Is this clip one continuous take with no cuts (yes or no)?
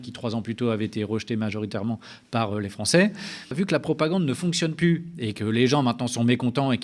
no